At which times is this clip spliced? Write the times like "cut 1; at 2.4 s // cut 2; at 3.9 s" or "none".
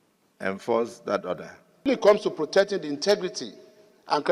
cut 1; at 1.9 s